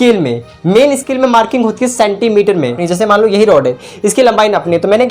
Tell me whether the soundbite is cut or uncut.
cut